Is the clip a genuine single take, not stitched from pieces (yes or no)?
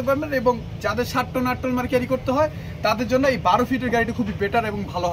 yes